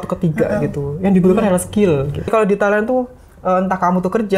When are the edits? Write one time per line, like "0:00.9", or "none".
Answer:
0:02.3